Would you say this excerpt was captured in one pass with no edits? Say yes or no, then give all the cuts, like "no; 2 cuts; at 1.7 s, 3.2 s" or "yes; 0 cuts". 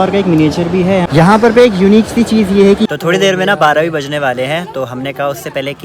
no; 2 cuts; at 1.1 s, 2.9 s